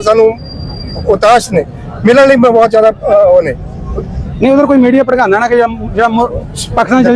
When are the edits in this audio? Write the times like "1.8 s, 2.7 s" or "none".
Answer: none